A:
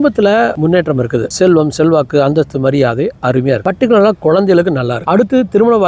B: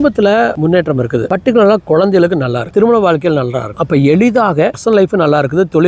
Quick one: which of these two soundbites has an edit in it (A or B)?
B